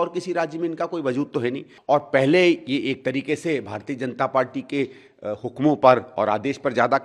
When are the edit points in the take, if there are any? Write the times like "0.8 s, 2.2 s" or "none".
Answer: 1.7 s